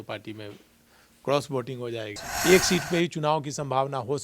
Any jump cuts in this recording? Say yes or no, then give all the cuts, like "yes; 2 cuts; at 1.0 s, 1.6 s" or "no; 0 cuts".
yes; 1 cut; at 2.2 s